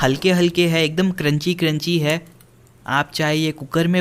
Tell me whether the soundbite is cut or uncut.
uncut